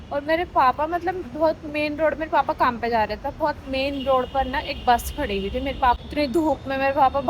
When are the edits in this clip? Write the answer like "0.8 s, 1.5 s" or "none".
6.0 s